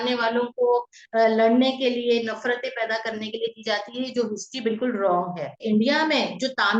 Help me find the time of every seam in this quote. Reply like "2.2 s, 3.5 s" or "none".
5.5 s